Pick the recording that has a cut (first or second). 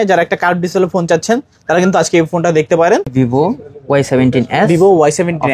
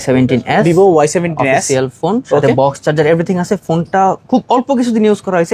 first